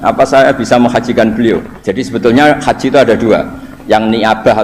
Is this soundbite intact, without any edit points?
no; 1 cut; at 1.8 s

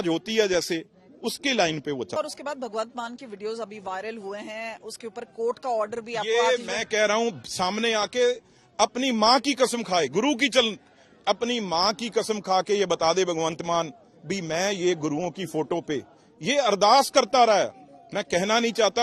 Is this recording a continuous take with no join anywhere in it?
no; 1 cut; at 2.2 s

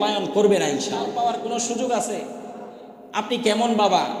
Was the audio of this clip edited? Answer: yes; 1 cut; at 1.1 s

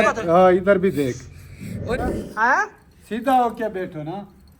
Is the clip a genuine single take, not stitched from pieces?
no; 1 cut; at 1.9 s

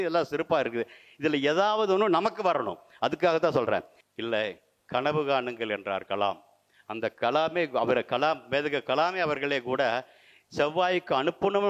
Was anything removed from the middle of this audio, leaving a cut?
yes; 1 cut; at 4.0 s

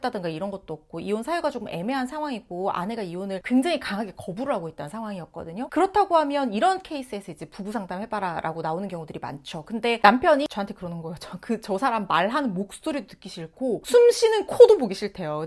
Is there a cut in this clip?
no; 0 cuts

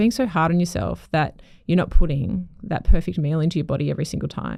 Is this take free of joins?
yes; 0 cuts

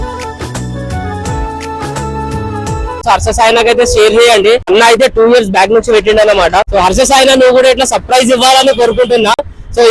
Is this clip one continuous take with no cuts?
no; 3 cuts; at 3.0 s, 4.7 s, 6.7 s

